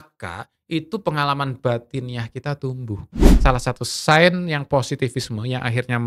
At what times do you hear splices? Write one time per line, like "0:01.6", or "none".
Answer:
0:03.3